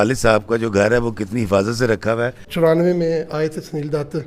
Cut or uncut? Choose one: cut